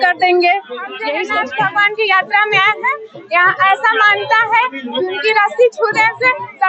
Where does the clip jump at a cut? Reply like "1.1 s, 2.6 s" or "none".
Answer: 1.1 s